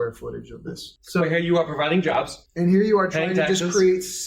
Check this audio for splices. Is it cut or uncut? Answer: cut